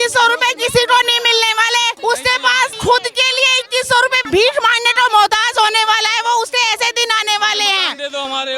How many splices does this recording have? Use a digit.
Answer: 2